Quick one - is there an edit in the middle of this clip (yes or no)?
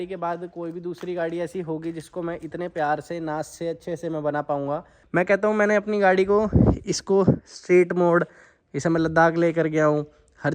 yes